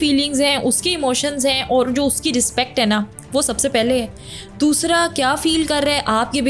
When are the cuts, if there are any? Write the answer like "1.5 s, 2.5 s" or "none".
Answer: none